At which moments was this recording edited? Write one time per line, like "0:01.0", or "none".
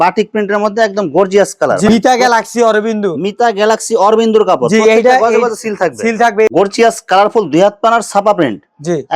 0:01.9
0:06.5